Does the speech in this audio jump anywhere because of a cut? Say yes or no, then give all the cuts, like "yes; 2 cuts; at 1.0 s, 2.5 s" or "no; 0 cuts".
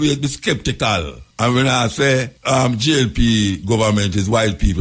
yes; 2 cuts; at 1.2 s, 2.3 s